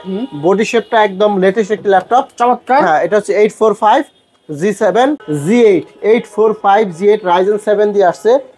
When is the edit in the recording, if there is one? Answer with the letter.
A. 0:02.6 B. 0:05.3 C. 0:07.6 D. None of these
B